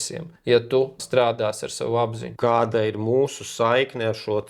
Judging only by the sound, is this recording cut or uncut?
cut